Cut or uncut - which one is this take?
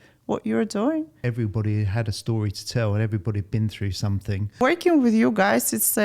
cut